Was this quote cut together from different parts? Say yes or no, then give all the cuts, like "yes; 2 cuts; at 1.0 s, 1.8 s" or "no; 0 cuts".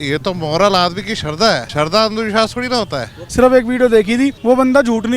yes; 3 cuts; at 1.7 s, 3.2 s, 4.4 s